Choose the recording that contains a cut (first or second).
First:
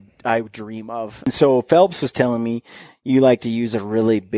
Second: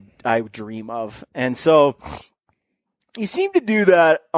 first